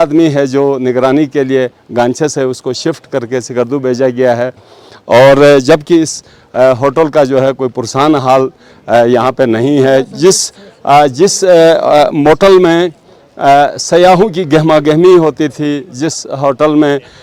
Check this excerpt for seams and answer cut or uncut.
uncut